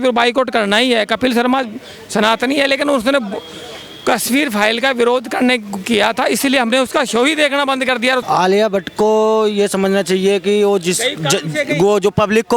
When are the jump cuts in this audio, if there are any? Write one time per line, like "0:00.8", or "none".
0:08.2